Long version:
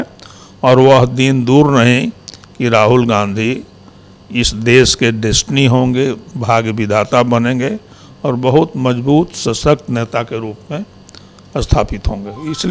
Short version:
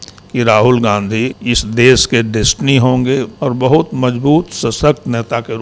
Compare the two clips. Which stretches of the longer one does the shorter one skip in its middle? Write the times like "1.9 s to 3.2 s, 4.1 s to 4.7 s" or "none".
3.6 s to 4.3 s, 6.2 s to 8.1 s